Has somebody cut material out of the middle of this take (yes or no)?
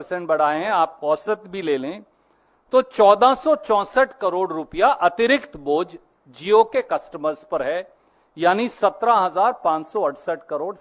no